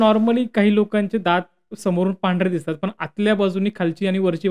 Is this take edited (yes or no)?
no